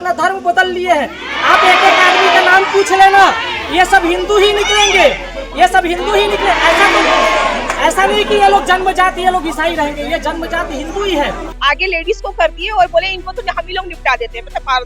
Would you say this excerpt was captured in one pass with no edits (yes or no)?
no